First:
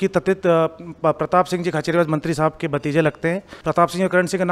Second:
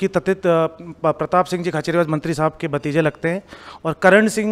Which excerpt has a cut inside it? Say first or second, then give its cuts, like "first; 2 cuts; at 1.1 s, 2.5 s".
first; 1 cut; at 3.5 s